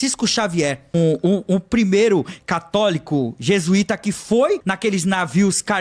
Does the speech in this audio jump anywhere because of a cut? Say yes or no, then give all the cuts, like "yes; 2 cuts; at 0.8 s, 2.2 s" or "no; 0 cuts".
yes; 2 cuts; at 0.9 s, 4.7 s